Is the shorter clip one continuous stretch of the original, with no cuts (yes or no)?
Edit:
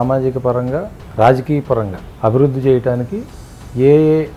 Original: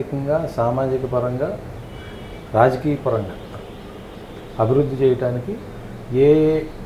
no